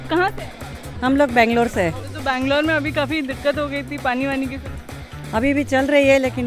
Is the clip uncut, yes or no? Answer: yes